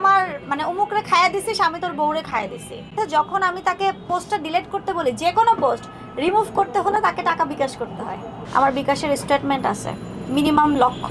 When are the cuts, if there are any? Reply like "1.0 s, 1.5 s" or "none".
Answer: 8.3 s